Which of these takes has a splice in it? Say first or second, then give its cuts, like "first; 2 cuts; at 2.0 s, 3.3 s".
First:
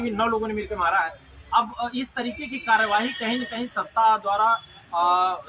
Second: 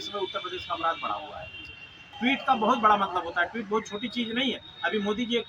second; 1 cut; at 2.0 s